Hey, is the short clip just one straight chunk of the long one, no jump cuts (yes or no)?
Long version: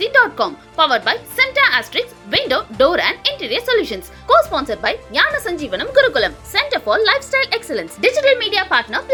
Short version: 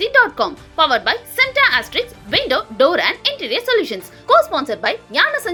yes